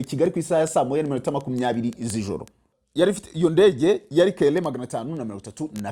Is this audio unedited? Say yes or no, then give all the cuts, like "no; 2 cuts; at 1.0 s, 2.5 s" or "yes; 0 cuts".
no; 1 cut; at 2.8 s